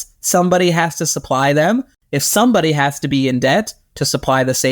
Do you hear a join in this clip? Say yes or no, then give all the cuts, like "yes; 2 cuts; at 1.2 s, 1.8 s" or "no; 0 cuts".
yes; 1 cut; at 2.0 s